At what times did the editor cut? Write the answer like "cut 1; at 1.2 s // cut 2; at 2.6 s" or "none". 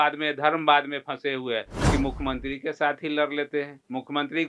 cut 1; at 1.7 s